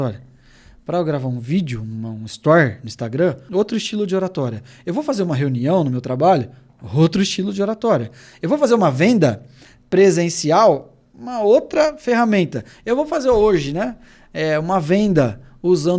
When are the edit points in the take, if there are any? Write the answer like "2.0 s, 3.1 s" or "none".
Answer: 3.4 s